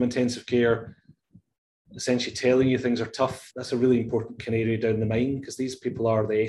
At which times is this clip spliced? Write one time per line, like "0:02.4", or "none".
0:03.4